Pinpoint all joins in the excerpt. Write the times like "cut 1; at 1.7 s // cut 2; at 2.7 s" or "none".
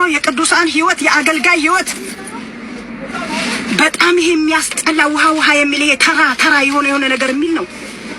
none